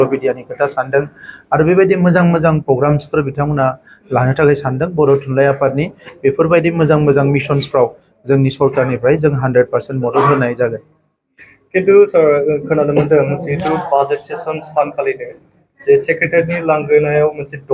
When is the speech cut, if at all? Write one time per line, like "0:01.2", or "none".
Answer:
none